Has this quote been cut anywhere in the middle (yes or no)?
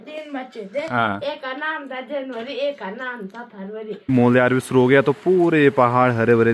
yes